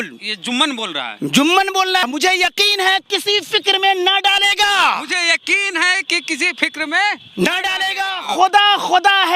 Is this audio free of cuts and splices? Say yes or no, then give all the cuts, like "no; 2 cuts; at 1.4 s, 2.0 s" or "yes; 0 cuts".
no; 1 cut; at 2.1 s